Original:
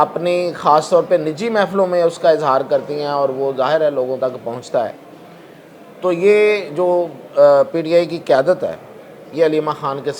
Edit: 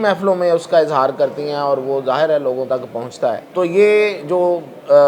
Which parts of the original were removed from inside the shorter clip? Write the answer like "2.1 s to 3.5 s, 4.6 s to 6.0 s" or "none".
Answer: 5.0 s to 5.9 s